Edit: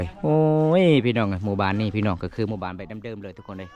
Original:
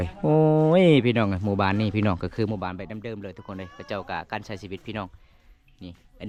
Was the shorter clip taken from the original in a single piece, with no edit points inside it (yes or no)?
yes